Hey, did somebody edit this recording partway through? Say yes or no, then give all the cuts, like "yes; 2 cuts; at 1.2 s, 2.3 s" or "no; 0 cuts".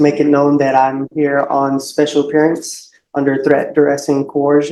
no; 0 cuts